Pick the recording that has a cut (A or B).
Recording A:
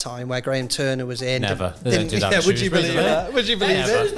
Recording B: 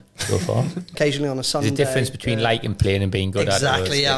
B